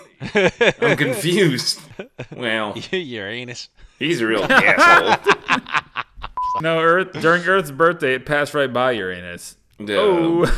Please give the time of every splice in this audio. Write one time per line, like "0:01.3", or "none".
0:01.9
0:06.4